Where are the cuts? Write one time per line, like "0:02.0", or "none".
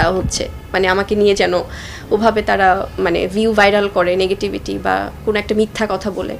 none

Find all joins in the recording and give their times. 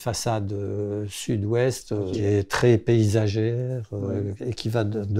0:02.1

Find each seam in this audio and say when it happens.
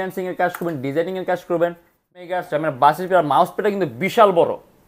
0:02.2

